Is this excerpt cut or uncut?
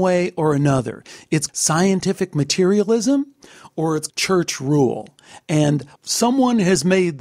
cut